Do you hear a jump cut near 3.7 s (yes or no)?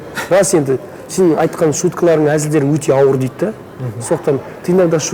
no